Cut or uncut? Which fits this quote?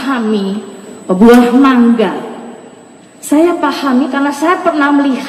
uncut